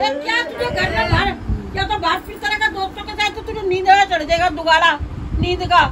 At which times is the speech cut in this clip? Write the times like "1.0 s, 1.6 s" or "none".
1.3 s